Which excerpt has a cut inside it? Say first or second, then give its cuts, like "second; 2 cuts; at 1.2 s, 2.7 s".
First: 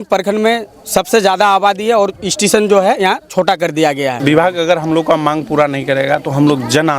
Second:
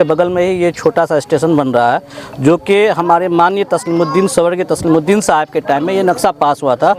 first; 1 cut; at 4.1 s